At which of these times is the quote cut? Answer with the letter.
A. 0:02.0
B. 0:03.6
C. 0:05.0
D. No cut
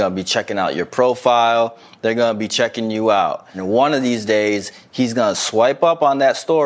B